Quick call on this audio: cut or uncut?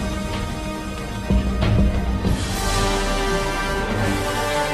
uncut